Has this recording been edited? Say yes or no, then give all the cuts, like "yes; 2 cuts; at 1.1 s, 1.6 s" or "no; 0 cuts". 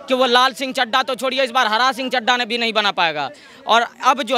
no; 0 cuts